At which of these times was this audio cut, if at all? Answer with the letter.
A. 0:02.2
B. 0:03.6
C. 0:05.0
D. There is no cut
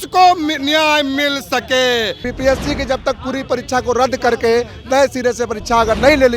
A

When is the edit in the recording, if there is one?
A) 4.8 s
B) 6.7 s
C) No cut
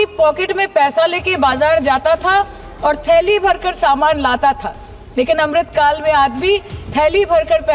C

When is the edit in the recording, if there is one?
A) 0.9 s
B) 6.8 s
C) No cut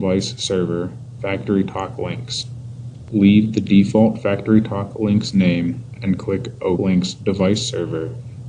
B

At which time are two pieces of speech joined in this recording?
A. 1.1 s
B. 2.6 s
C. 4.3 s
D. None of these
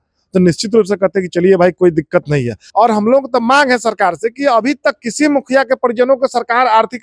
B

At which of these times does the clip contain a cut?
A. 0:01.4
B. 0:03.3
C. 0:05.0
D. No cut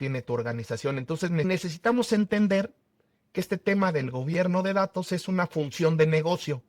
A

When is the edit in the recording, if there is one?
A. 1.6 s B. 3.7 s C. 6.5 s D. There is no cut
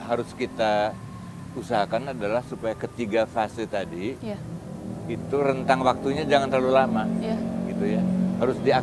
D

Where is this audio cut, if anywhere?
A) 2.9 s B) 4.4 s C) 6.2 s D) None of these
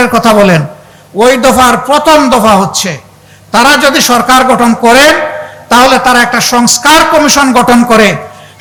D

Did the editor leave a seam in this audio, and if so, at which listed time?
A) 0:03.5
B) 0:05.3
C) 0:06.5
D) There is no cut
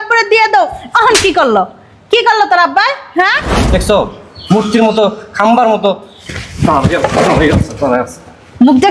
A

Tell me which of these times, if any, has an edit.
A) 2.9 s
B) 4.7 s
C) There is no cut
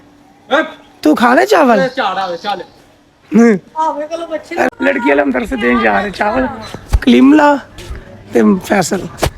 B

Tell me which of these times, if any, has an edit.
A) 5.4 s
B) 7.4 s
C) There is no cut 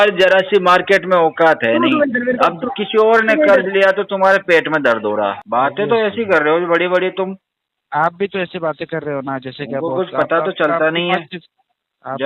A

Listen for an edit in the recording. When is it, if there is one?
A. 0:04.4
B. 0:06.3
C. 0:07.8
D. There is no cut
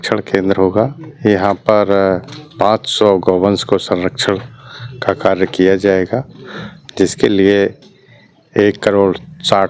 D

